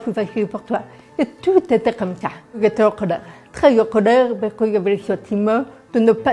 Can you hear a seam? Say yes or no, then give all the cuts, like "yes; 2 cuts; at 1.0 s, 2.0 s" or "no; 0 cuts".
yes; 2 cuts; at 2.6 s, 3.5 s